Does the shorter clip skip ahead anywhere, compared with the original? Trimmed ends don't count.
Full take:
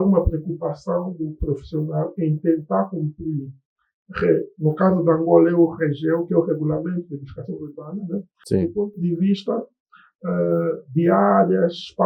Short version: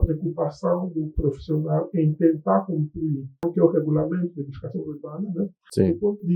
yes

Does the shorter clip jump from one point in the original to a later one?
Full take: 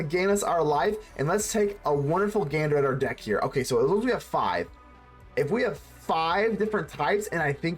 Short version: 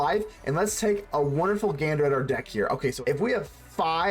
yes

